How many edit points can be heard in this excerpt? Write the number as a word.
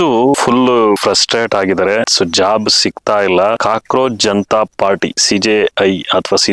zero